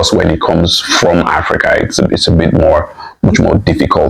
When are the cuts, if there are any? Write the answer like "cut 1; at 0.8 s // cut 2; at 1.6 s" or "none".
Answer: none

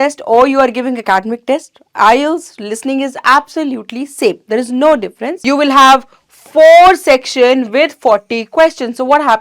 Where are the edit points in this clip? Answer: cut 1; at 5.2 s

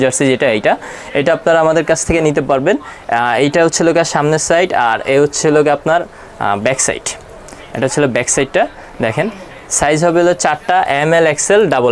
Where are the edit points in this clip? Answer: none

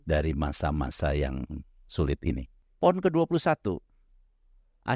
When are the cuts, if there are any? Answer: cut 1; at 2.6 s

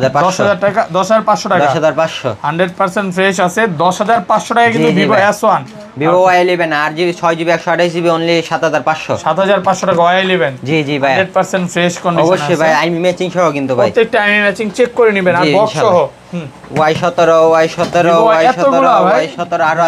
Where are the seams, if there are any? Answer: none

